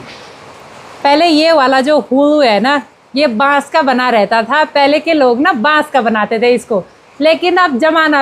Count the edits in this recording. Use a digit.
0